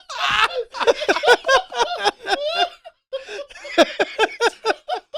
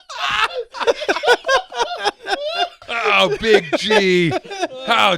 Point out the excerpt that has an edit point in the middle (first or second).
second